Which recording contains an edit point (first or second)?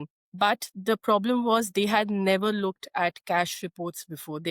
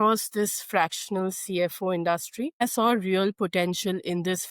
second